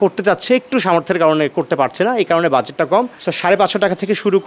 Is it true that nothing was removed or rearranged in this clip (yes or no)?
no